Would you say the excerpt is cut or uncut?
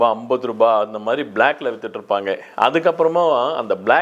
uncut